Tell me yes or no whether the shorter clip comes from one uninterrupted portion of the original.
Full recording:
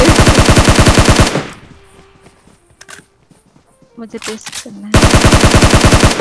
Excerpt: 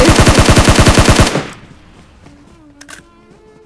yes